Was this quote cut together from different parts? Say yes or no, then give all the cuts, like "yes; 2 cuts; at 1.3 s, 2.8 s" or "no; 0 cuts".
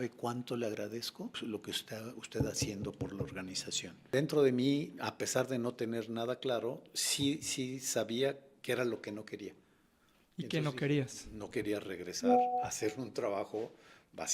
yes; 2 cuts; at 1.4 s, 4.1 s